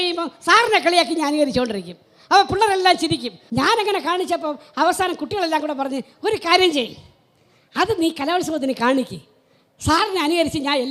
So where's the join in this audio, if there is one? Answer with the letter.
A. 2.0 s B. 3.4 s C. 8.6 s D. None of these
B